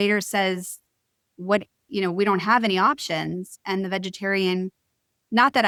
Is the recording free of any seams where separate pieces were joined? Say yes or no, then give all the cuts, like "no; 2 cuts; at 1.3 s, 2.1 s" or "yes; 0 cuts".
yes; 0 cuts